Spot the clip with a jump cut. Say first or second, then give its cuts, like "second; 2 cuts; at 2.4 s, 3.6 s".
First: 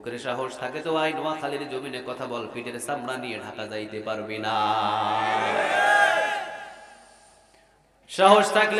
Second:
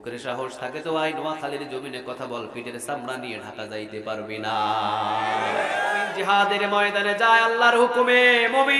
second; 1 cut; at 6.0 s